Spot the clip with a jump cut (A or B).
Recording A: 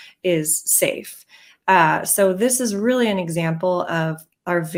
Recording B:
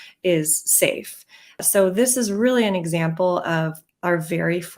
B